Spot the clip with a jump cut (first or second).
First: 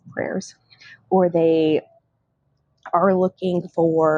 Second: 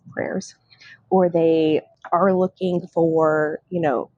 second